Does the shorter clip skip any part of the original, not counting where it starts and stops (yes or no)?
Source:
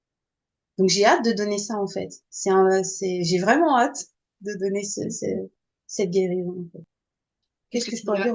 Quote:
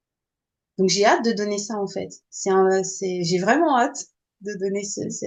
no